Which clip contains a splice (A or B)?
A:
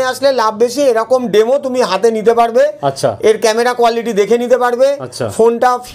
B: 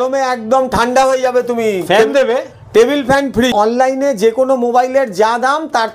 B